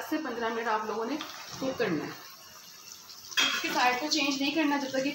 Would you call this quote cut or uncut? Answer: uncut